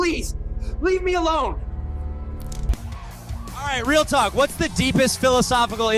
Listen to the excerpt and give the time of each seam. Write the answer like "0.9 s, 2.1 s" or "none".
2.7 s